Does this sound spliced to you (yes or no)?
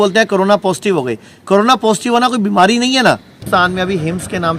yes